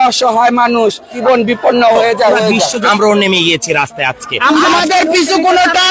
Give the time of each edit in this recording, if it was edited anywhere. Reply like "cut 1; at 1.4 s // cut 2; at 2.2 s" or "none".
cut 1; at 1.2 s // cut 2; at 2.8 s // cut 3; at 4.7 s

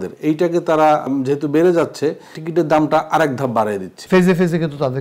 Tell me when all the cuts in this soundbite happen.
cut 1; at 1.0 s // cut 2; at 2.4 s // cut 3; at 3.9 s

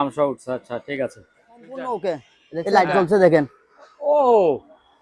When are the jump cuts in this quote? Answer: cut 1; at 1.7 s

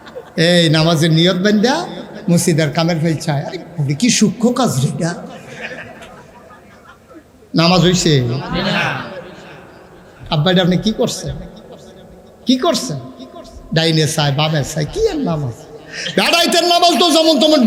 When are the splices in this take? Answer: none

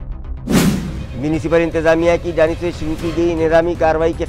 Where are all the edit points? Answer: cut 1; at 0.9 s

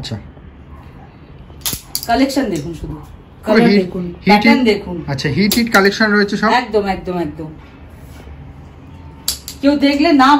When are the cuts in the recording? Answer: none

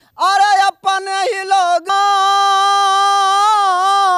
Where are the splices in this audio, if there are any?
cut 1; at 1.9 s

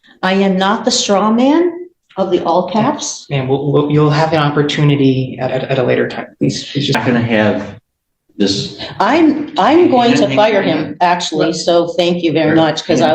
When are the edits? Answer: cut 1; at 7.0 s

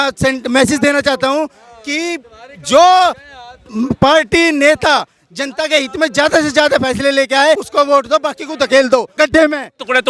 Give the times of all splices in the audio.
cut 1; at 7.6 s // cut 2; at 9.2 s

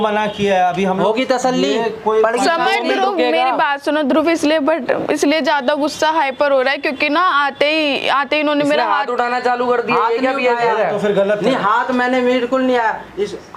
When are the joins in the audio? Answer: none

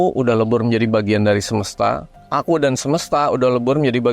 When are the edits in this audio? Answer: cut 1; at 2.1 s

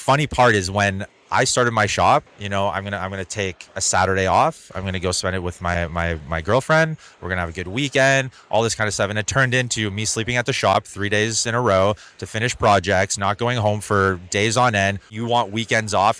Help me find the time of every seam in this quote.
cut 1; at 2.4 s // cut 2; at 15.1 s

